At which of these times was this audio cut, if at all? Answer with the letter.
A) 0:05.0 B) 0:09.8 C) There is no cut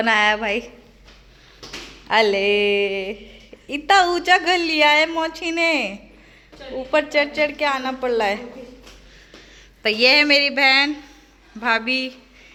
C